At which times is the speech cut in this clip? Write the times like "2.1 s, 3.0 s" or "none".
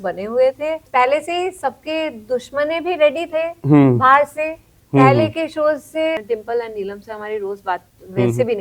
0.9 s, 6.2 s